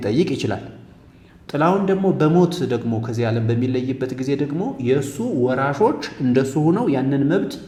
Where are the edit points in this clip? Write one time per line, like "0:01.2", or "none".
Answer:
none

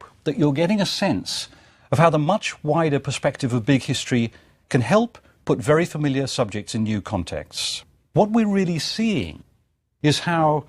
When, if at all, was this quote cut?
none

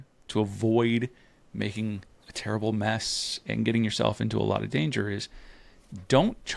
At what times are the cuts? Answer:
none

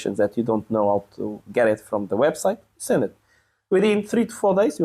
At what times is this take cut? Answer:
none

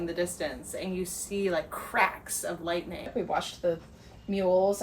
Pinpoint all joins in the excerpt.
0:03.1

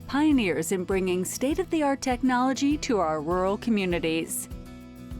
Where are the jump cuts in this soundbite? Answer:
0:04.3

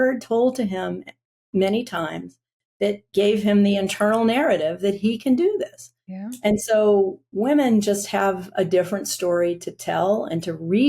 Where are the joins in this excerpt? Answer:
none

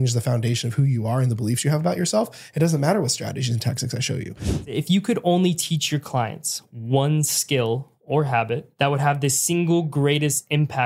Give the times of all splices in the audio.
0:04.7
0:08.7

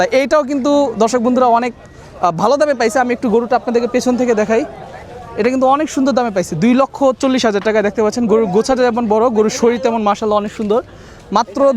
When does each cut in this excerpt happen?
none

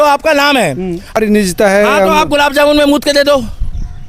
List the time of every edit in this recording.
0:01.2

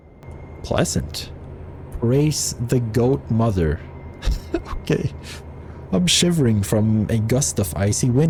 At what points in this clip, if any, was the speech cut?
none

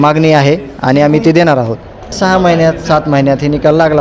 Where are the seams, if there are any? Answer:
0:02.1

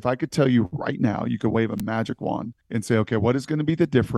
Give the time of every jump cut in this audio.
0:02.6

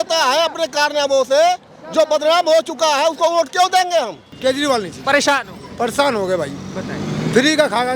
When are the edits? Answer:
0:04.2

